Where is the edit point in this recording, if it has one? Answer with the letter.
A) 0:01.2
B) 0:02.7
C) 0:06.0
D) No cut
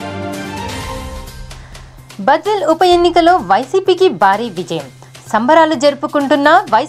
A